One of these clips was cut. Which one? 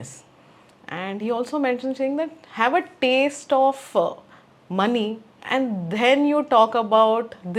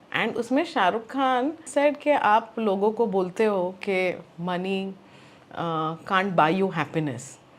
second; 1 cut; at 1.6 s

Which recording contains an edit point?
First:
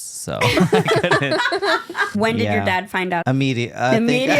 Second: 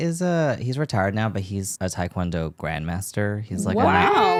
first; 2 cuts; at 2.1 s, 3.2 s

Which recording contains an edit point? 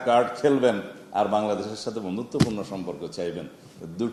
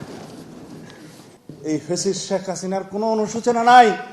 second; 1 cut; at 1.3 s

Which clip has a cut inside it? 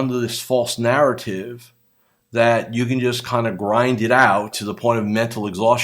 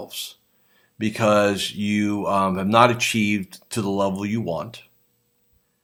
first; 1 cut; at 4.6 s

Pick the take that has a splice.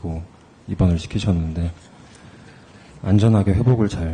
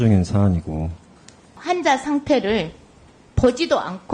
second; 1 cut; at 1.6 s

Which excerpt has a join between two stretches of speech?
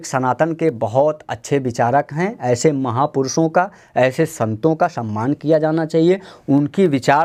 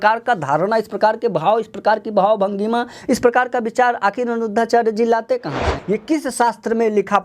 second; 1 cut; at 5.7 s

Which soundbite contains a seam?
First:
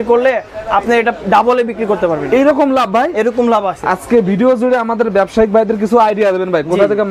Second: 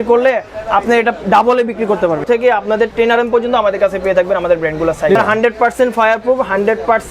second; 2 cuts; at 2.2 s, 5.2 s

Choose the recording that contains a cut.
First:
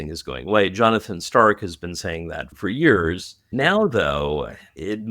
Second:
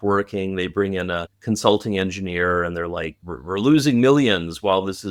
first; 1 cut; at 3.3 s

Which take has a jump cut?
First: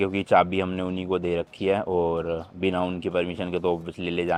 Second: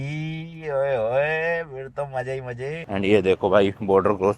second; 1 cut; at 2.9 s

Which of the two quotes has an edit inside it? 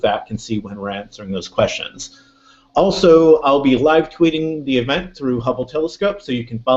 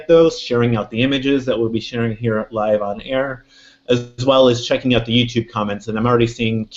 first; 1 cut; at 4.4 s

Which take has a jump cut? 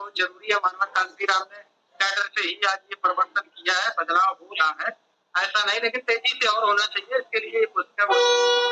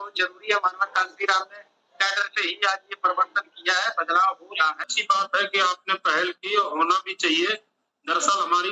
second; 1 cut; at 4.9 s

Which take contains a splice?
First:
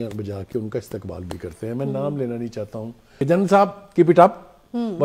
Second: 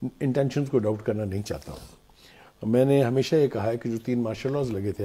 first; 1 cut; at 3.2 s

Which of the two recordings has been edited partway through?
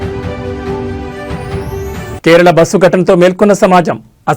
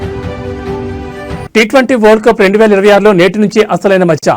first; 1 cut; at 1.3 s

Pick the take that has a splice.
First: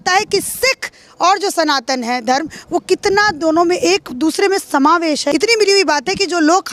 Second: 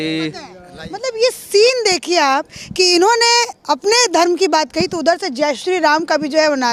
first; 1 cut; at 5.3 s

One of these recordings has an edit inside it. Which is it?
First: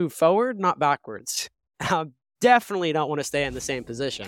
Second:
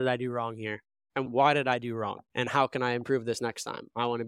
second; 1 cut; at 2.2 s

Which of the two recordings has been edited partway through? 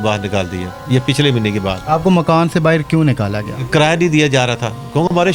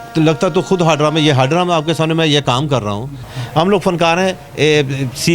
second; 1 cut; at 3.2 s

